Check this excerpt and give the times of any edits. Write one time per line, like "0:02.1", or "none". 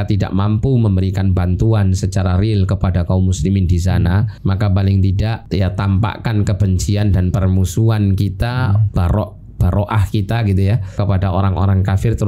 0:04.3
0:05.4
0:11.0